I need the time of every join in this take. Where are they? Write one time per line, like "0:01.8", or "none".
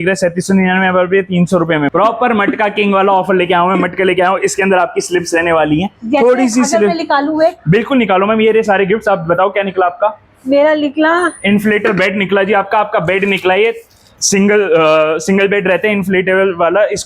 0:01.9